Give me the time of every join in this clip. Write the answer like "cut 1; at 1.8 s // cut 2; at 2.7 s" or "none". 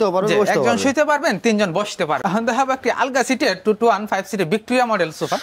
cut 1; at 2.2 s